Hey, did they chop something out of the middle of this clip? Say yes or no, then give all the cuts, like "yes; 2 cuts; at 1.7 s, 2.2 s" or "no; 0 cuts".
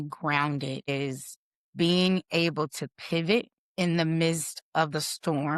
no; 0 cuts